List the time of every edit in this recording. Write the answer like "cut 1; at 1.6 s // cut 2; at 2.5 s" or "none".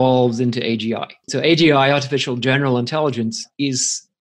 cut 1; at 1.3 s